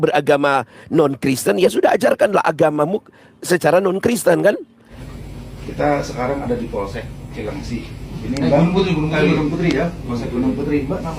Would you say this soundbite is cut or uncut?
cut